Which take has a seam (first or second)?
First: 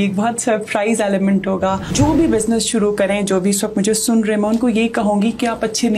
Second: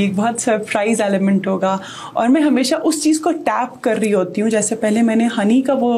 first